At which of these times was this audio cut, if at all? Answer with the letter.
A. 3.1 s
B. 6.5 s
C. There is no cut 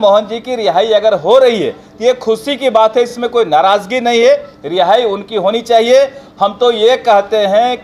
C